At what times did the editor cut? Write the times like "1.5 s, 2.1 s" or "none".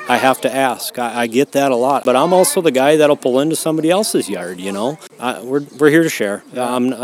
2.0 s, 5.1 s